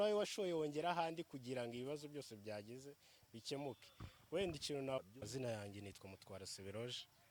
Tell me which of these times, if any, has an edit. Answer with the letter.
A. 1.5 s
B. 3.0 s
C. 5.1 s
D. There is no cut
C